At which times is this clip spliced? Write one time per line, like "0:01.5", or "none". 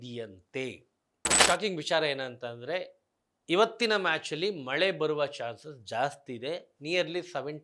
0:01.4